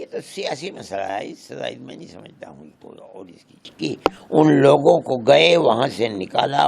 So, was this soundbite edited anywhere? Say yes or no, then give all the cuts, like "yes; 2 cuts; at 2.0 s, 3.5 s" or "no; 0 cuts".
yes; 1 cut; at 3.7 s